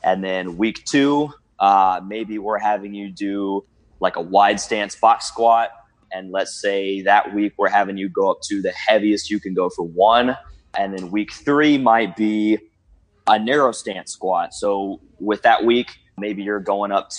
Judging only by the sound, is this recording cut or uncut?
cut